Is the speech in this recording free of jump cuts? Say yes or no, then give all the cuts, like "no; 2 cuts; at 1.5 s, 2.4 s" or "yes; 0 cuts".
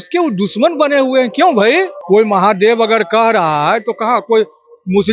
no; 1 cut; at 2.0 s